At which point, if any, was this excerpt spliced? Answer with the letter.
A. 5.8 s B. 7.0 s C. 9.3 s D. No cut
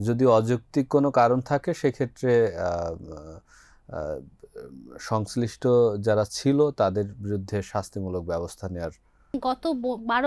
C